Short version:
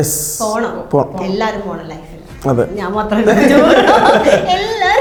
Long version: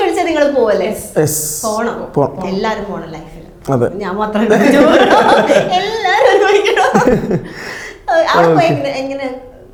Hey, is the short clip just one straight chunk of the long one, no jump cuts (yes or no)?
yes